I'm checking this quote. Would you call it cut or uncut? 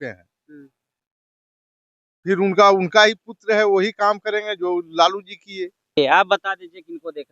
cut